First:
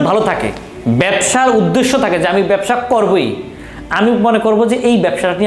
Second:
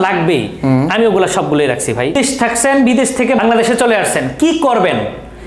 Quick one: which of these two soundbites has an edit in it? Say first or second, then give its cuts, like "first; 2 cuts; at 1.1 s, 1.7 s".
second; 2 cuts; at 2.1 s, 3.4 s